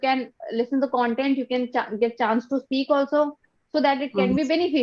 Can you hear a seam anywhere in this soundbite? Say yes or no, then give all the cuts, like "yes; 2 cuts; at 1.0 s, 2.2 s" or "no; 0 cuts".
no; 0 cuts